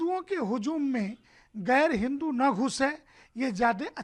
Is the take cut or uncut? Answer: uncut